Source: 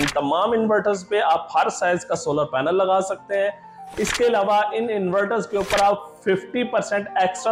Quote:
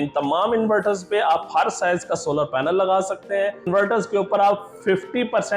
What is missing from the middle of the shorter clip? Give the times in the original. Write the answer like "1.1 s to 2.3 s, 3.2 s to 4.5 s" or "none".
3.7 s to 5.1 s